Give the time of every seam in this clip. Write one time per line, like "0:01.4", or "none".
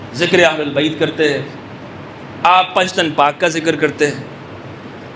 none